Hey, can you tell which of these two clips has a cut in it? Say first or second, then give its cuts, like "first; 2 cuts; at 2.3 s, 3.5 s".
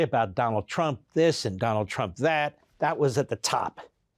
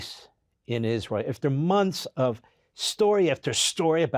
first; 1 cut; at 2.6 s